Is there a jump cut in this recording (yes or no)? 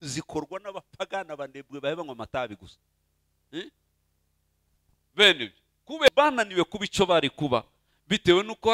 yes